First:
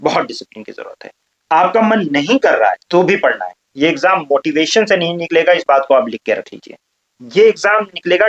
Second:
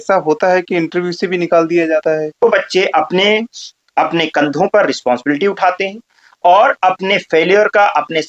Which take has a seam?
second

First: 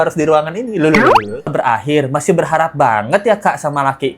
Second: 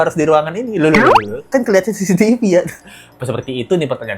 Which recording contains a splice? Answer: first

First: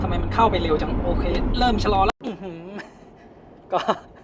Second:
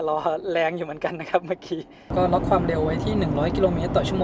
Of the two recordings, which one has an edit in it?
second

